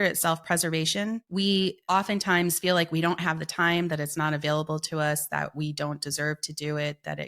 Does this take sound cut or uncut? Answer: cut